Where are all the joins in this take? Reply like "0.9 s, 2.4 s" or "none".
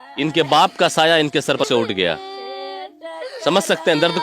1.6 s

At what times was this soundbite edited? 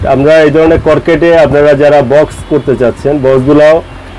none

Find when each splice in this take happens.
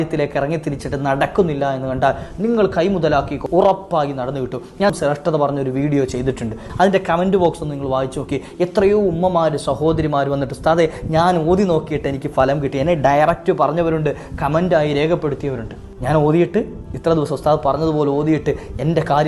3.4 s, 5.0 s, 6.7 s

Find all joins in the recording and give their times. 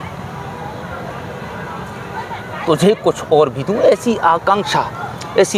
none

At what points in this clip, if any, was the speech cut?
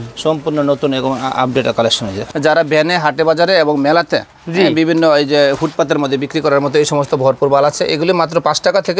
2.2 s

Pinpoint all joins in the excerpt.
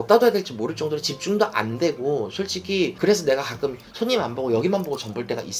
none

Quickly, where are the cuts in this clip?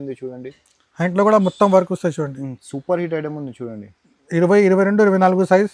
none

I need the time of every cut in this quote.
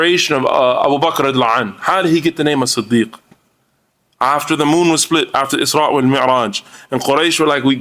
none

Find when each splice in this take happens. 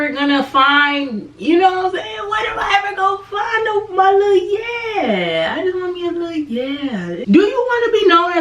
7.2 s

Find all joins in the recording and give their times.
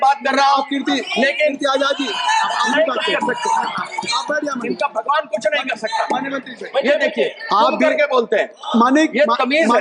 6.5 s

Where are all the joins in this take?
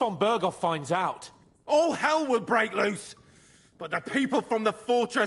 none

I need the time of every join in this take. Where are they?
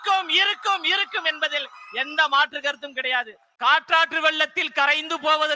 3.4 s

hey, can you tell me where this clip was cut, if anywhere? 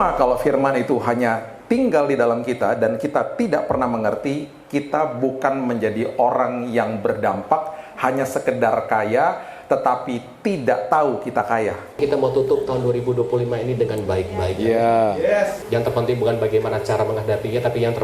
12.0 s, 15.6 s

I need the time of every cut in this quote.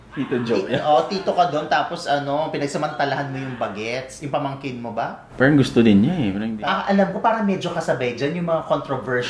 6.4 s

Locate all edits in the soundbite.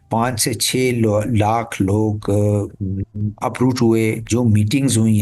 4.2 s

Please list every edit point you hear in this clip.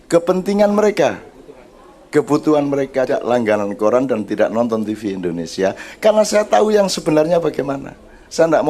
3.1 s

